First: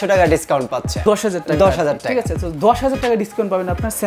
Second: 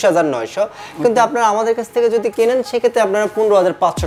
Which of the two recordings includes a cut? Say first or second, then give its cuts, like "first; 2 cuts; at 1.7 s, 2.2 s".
first; 1 cut; at 1.0 s